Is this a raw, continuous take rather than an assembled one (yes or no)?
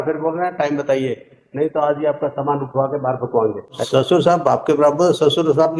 no